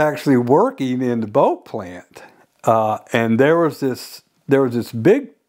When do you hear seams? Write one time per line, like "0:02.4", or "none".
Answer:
none